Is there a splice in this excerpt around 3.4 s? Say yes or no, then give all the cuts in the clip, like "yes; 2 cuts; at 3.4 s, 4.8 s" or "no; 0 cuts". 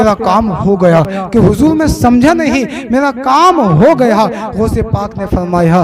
no; 1 cut; at 1.1 s